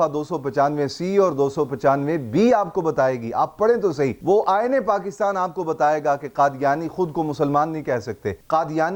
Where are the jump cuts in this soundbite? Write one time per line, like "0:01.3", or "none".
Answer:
none